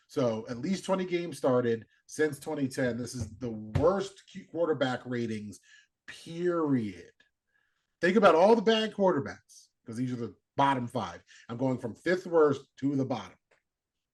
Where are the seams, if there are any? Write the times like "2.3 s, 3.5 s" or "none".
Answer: none